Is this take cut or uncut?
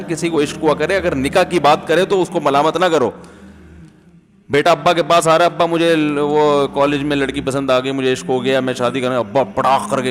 uncut